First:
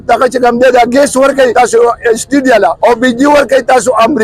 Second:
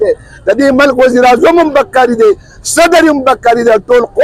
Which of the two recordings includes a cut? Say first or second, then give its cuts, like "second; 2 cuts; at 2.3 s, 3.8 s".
first; 2 cuts; at 1.5 s, 2.8 s